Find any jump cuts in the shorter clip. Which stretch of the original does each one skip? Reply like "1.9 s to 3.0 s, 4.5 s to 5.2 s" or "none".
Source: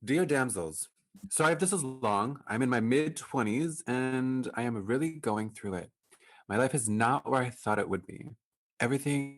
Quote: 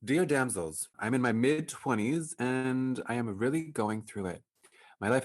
0.9 s to 2.4 s